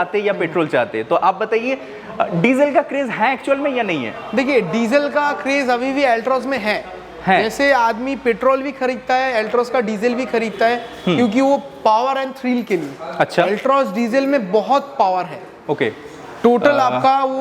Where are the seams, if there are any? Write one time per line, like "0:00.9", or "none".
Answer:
none